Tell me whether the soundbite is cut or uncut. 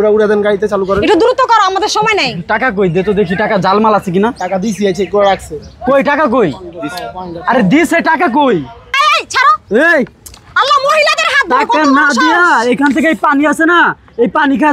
cut